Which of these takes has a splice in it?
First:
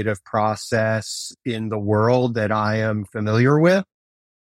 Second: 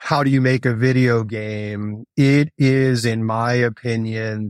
second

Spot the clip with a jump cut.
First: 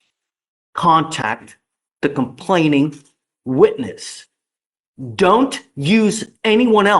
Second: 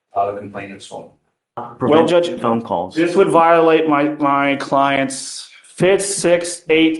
second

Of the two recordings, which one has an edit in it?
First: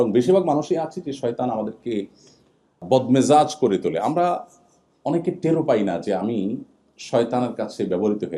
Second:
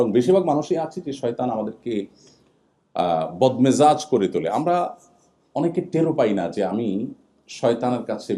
first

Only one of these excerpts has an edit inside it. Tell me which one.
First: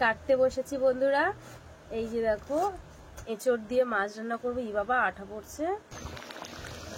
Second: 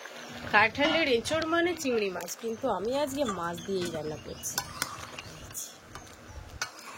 first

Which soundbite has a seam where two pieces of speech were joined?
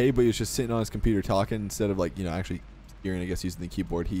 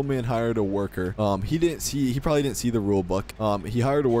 second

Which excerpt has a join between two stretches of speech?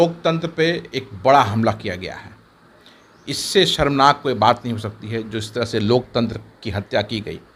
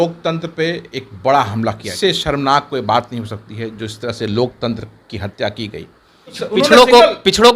second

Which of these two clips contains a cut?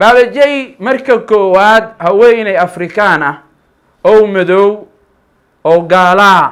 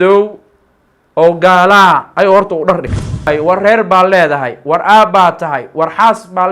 second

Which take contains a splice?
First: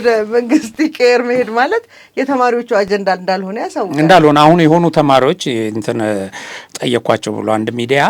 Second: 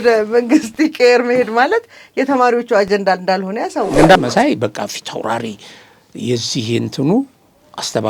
second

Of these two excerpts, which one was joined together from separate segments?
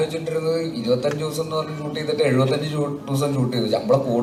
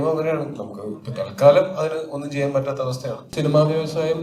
second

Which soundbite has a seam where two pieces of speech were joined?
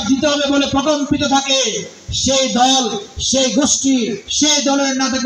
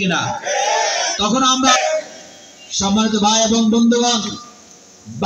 second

